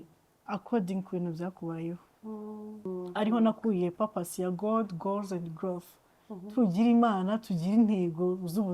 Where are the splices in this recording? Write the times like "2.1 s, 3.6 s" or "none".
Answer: 2.9 s